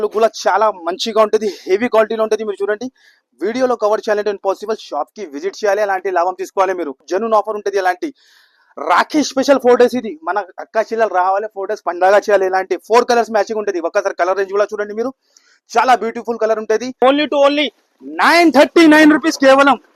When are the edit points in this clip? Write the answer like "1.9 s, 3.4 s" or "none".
7.0 s, 17.0 s